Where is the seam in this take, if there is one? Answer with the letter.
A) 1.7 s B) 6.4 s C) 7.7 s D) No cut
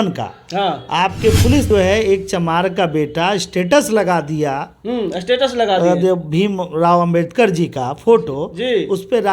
A